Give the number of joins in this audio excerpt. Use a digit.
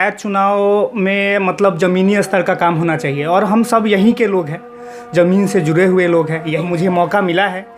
1